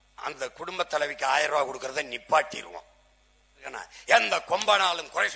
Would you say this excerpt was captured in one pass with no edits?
no; 1 cut; at 3.6 s

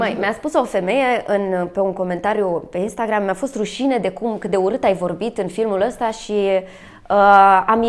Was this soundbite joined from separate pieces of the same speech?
no; 0 cuts

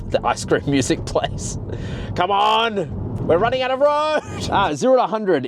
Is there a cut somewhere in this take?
yes; 2 cuts; at 3.1 s, 4.4 s

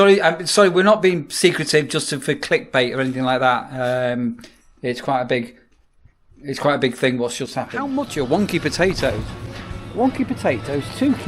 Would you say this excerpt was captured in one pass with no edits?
no; 1 cut; at 7.8 s

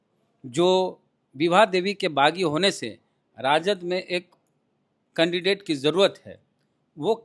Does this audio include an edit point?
no; 0 cuts

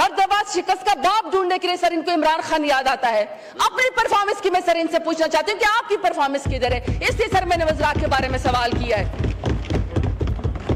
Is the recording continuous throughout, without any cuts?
yes; 0 cuts

